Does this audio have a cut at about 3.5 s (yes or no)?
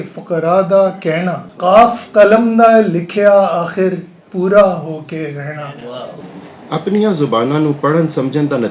no